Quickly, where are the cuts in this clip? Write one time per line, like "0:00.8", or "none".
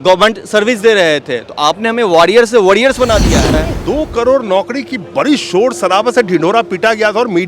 0:03.7